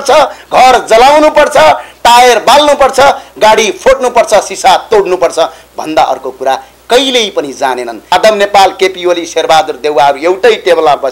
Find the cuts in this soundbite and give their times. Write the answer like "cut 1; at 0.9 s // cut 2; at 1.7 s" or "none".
cut 1; at 8.1 s